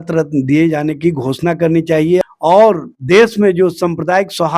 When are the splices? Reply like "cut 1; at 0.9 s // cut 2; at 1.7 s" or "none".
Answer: cut 1; at 2.2 s